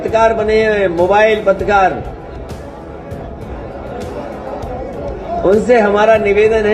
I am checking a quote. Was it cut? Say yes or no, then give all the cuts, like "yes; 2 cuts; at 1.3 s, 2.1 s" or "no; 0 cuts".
no; 0 cuts